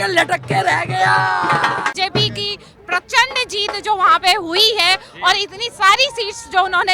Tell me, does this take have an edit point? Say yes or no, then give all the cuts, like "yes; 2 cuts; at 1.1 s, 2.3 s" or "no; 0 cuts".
yes; 1 cut; at 1.9 s